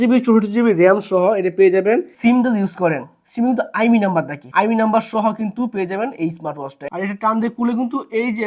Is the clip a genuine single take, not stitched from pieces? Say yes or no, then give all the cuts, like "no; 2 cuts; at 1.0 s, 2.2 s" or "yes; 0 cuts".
no; 2 cuts; at 2.1 s, 6.9 s